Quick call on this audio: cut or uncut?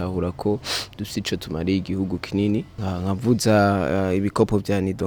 cut